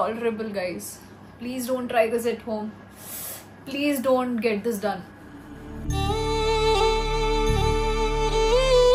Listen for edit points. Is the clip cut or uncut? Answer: uncut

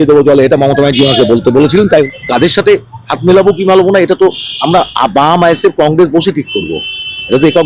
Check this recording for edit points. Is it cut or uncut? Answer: cut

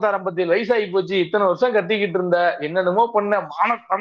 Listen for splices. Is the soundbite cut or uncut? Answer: uncut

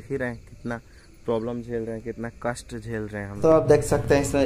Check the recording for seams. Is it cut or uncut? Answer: cut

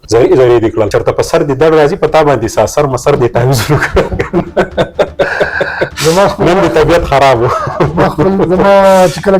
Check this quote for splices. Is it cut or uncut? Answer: cut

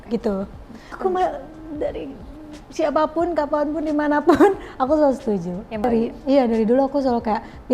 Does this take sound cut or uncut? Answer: cut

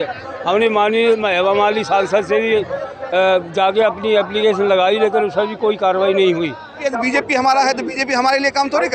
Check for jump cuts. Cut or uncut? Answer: cut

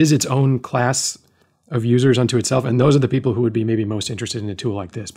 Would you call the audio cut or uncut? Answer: uncut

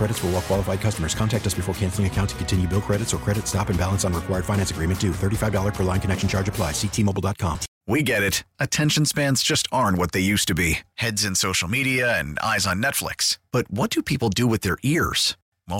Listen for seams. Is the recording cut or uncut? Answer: cut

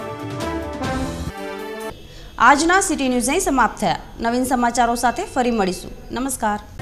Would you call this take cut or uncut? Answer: uncut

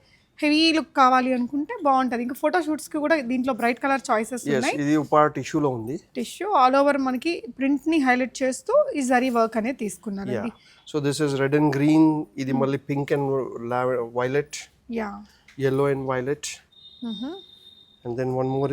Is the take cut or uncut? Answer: uncut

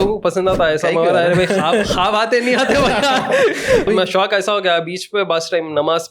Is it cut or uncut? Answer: cut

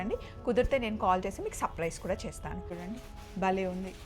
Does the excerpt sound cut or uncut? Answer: cut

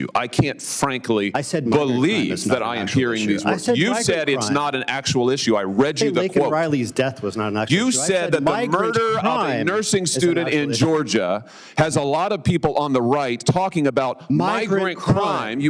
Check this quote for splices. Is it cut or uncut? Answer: uncut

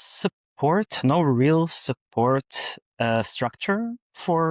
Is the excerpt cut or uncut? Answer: uncut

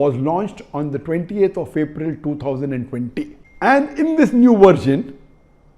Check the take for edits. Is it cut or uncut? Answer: cut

